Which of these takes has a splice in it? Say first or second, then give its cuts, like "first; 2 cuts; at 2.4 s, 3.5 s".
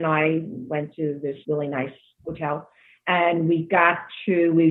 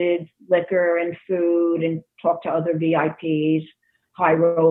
first; 1 cut; at 1.2 s